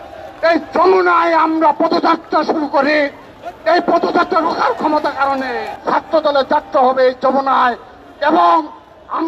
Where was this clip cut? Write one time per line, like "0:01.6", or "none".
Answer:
0:05.7